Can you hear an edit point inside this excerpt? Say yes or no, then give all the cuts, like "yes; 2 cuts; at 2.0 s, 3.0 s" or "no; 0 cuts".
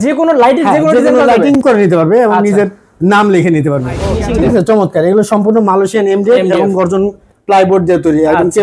yes; 1 cut; at 4.0 s